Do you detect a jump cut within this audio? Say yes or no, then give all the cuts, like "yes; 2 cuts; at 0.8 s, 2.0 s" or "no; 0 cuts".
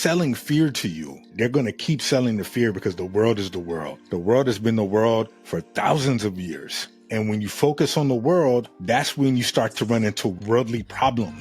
yes; 2 cuts; at 1.3 s, 7.0 s